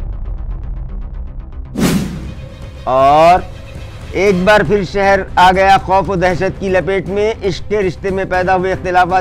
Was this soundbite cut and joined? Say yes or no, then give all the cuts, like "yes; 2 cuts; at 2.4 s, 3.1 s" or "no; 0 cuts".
yes; 1 cut; at 2.3 s